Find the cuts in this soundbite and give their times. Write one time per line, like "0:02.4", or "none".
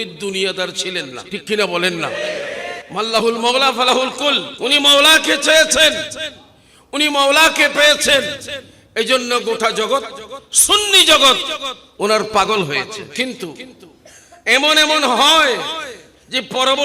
0:01.2
0:02.8
0:04.5
0:13.1